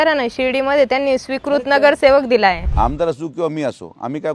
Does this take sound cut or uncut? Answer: cut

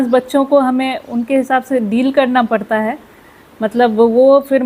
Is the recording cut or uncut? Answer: uncut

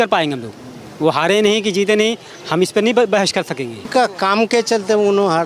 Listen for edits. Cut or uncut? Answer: cut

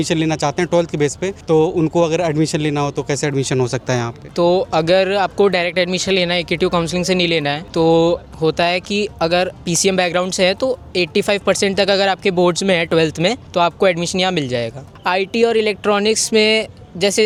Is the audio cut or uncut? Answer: uncut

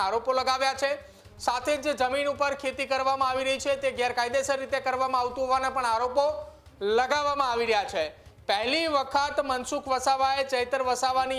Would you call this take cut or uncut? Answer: uncut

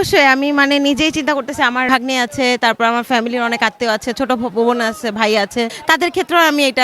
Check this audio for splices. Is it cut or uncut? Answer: cut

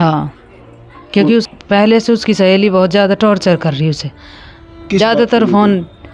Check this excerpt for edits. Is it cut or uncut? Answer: cut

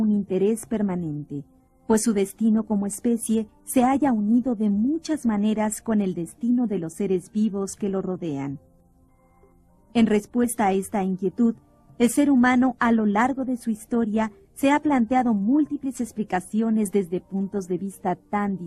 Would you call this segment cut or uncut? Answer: uncut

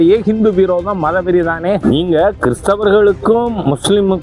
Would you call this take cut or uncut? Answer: cut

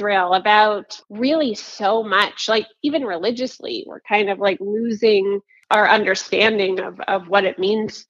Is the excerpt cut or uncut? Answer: cut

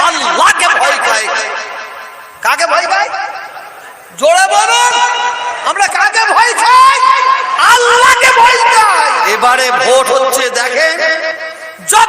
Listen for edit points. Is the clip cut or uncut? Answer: cut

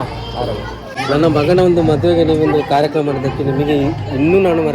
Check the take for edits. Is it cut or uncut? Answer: cut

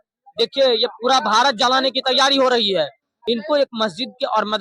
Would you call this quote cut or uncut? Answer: cut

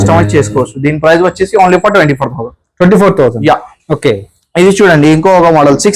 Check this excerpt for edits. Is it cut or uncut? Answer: uncut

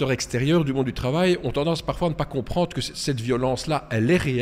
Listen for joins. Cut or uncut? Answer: uncut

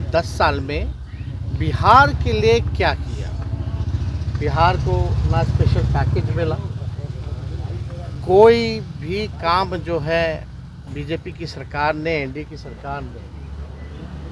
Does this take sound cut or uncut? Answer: uncut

